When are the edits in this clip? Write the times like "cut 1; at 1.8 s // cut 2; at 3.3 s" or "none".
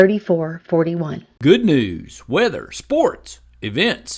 none